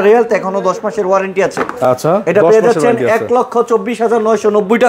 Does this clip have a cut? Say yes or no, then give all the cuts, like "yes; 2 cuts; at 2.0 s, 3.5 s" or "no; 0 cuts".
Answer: no; 0 cuts